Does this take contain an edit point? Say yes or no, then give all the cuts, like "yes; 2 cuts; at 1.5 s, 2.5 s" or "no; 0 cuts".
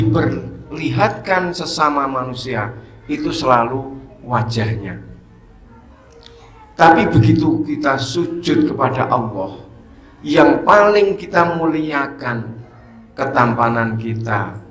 no; 0 cuts